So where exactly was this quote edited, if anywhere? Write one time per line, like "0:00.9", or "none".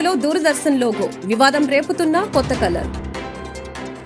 none